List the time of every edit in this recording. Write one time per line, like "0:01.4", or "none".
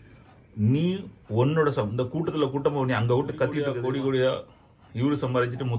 0:03.7